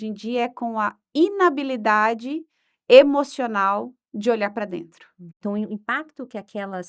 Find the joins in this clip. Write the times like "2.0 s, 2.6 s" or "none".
5.4 s